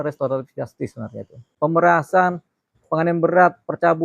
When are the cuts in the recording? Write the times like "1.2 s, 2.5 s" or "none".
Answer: 1.5 s

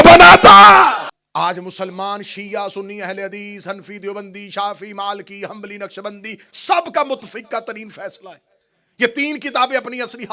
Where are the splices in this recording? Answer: 1.2 s

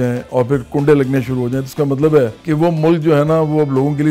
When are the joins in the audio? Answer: 2.4 s

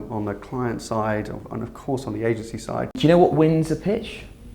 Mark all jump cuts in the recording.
2.9 s

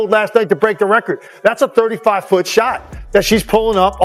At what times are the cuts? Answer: none

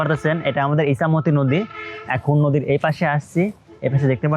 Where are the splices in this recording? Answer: none

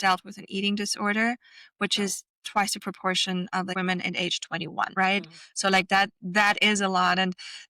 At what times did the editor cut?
3.7 s, 4.9 s

